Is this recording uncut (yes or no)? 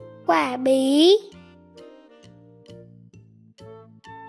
no